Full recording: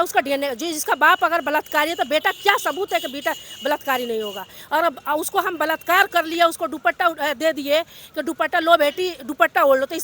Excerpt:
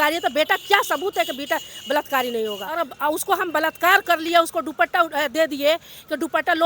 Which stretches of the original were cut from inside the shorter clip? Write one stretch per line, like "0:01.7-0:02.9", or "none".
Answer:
0:04.5-0:04.9